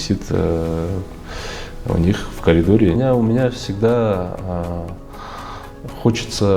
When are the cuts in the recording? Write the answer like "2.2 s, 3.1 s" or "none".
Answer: 3.0 s